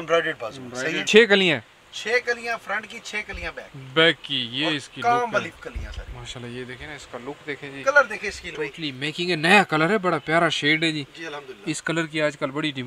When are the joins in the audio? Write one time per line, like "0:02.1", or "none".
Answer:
0:01.0